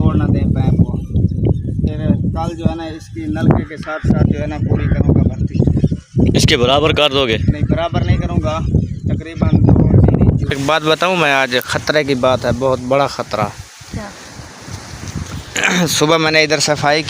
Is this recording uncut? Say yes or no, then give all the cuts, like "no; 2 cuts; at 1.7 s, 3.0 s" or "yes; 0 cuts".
no; 1 cut; at 10.6 s